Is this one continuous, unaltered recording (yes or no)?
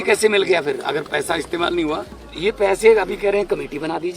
no